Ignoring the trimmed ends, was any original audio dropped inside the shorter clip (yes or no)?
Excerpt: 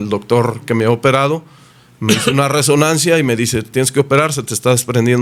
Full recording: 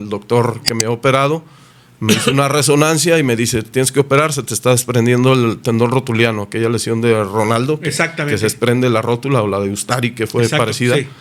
no